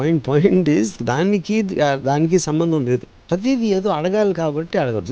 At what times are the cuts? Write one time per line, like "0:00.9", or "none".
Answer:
0:03.3

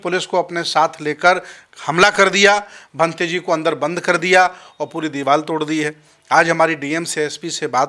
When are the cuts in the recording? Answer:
none

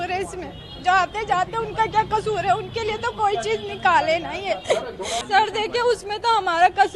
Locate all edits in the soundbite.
0:05.2

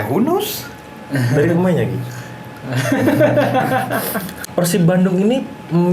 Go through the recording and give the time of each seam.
0:04.4

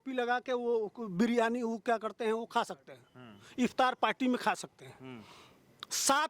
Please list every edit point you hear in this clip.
none

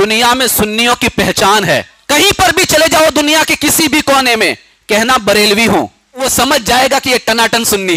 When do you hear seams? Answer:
0:01.9
0:06.2

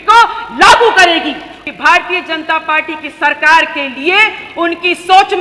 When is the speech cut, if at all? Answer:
0:01.5

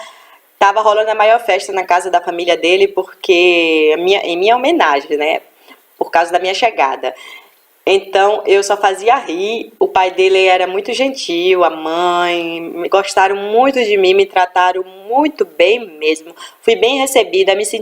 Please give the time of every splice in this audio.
0:11.6

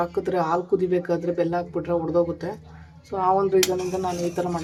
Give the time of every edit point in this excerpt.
none

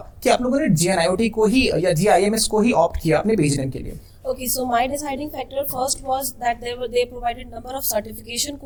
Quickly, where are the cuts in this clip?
none

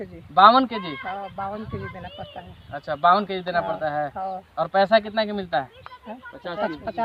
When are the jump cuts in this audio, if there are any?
none

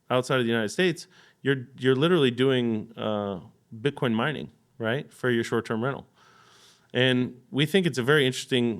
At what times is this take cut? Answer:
none

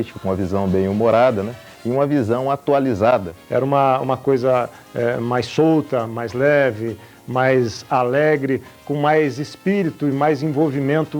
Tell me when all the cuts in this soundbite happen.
0:03.4

